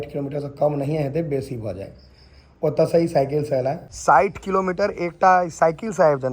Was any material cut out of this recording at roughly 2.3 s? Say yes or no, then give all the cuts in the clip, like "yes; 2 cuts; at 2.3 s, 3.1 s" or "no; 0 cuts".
no; 1 cut; at 3.9 s